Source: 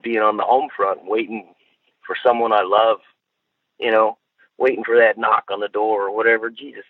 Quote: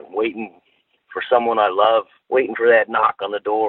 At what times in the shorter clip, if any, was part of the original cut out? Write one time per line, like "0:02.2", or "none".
0:02.2